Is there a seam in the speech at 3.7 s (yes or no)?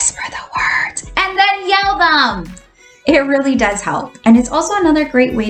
no